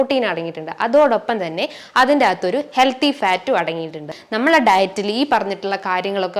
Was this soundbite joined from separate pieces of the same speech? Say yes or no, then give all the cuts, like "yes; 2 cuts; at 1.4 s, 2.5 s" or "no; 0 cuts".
yes; 1 cut; at 4.2 s